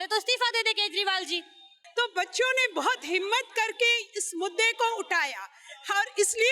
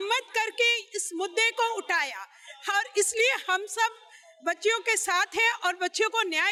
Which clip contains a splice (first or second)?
first